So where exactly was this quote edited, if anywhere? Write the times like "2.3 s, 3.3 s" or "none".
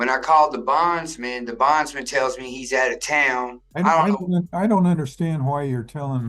3.6 s